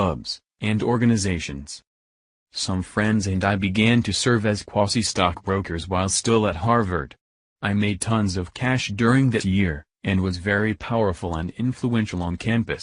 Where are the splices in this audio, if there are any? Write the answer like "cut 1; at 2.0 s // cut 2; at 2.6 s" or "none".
cut 1; at 9.1 s